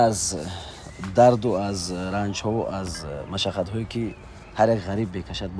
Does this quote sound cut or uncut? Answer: uncut